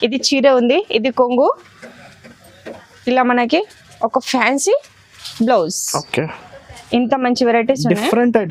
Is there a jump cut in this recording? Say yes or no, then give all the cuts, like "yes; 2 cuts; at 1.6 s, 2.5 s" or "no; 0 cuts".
no; 0 cuts